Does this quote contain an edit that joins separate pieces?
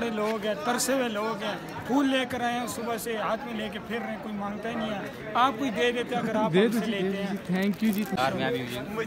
yes; 1 cut; at 8.2 s

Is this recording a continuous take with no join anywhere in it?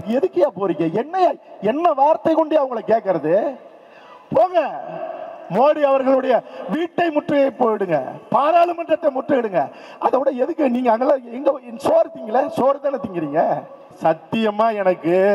no; 1 cut; at 13.9 s

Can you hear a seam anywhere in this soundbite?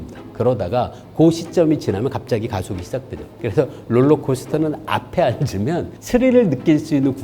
no; 0 cuts

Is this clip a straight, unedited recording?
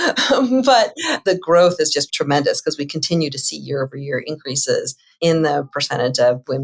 no; 3 cuts; at 1.1 s, 2.1 s, 5.0 s

